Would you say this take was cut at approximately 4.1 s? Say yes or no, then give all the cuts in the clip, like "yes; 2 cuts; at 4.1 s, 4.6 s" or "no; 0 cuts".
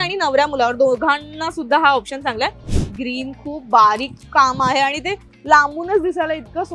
no; 1 cut; at 2.7 s